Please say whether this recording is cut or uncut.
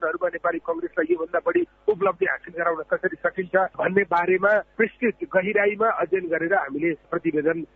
uncut